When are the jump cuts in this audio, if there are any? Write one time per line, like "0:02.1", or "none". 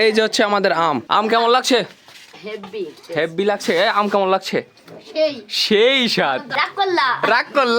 0:01.0
0:06.5